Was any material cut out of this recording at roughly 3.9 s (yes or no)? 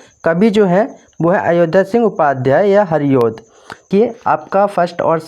yes